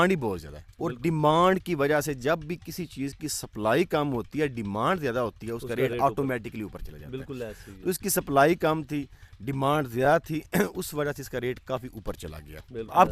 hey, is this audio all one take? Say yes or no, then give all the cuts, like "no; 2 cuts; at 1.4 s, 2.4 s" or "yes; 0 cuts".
yes; 0 cuts